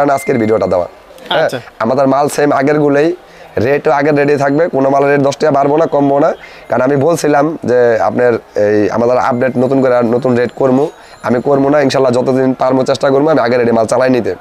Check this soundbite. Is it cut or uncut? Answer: uncut